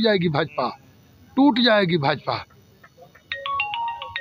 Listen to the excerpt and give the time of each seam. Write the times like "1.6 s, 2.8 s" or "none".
none

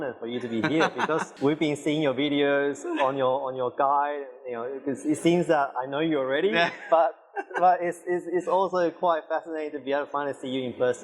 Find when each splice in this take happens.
1.3 s

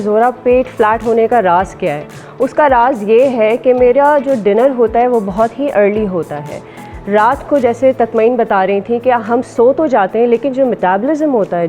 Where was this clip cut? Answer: none

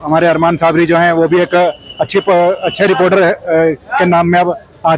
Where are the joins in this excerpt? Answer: none

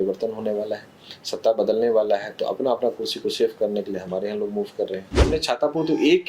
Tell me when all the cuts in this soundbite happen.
5.2 s

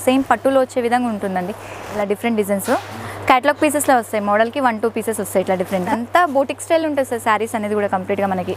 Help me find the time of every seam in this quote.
1.8 s, 6.0 s

